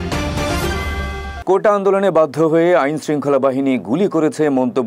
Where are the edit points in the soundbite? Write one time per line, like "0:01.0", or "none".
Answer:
0:01.4